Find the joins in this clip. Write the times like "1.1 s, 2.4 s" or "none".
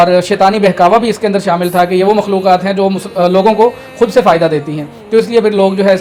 none